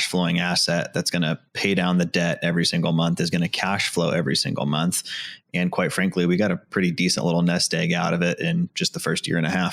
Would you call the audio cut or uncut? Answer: uncut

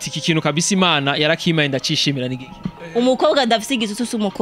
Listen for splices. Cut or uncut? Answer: cut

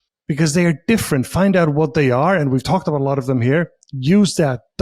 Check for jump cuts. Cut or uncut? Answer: uncut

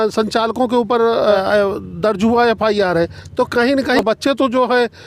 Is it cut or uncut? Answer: cut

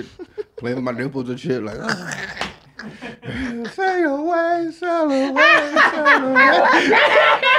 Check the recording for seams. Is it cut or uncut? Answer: uncut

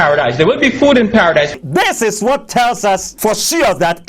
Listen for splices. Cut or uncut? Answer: cut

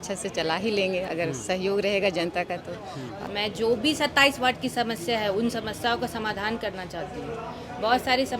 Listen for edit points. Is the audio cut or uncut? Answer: cut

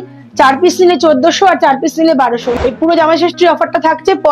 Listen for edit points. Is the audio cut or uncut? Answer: cut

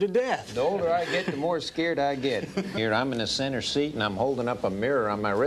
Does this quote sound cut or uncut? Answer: uncut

